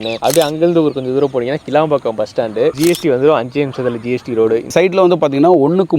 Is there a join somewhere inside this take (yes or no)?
yes